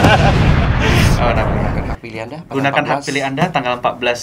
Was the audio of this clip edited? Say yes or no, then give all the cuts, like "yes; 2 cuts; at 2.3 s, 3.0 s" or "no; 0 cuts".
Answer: yes; 1 cut; at 1.9 s